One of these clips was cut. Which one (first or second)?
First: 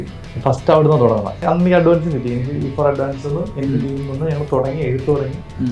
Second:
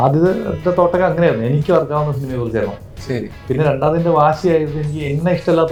first